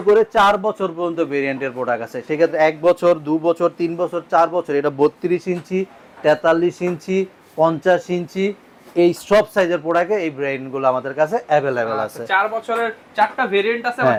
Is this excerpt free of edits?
yes; 0 cuts

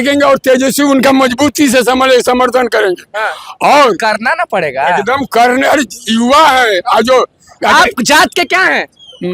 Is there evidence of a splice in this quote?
no; 0 cuts

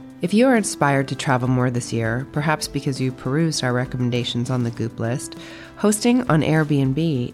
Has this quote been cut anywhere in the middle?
no; 0 cuts

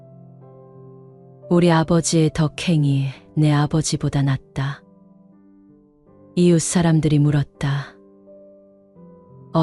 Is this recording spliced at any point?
no; 0 cuts

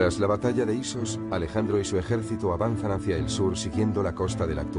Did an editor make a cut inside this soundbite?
no; 0 cuts

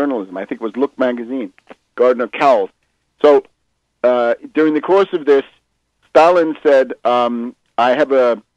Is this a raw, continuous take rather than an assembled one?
no; 1 cut; at 3.9 s

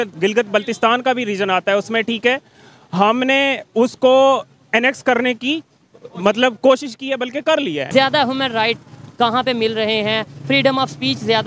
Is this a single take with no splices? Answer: no; 1 cut; at 7.8 s

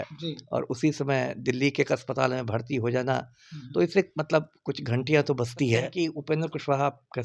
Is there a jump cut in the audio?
yes; 1 cut; at 5.9 s

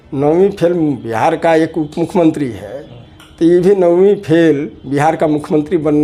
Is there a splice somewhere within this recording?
no; 0 cuts

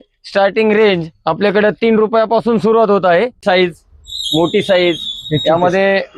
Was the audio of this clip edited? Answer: yes; 1 cut; at 3.4 s

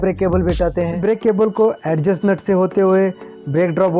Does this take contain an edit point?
yes; 1 cut; at 1.0 s

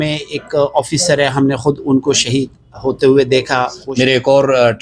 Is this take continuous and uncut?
no; 1 cut; at 3.8 s

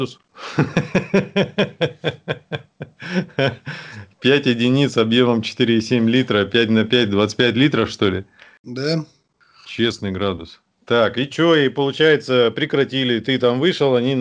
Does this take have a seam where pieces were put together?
no; 0 cuts

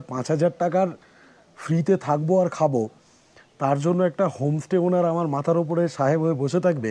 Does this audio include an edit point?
no; 0 cuts

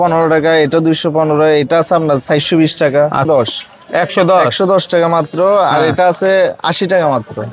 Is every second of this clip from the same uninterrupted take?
no; 1 cut; at 3.3 s

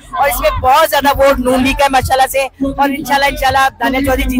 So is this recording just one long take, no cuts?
yes; 0 cuts

